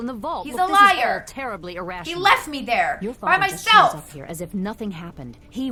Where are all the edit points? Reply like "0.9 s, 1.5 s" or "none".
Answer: none